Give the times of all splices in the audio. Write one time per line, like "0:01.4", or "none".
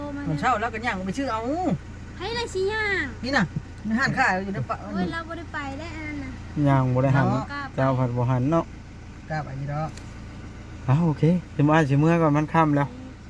none